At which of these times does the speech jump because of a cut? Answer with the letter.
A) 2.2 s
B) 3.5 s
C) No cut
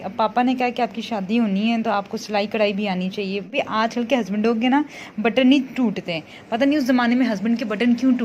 B